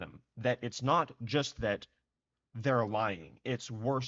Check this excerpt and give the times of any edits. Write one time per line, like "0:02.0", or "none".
none